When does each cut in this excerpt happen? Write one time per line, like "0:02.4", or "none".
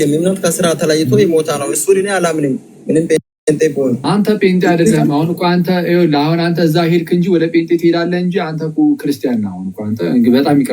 0:04.0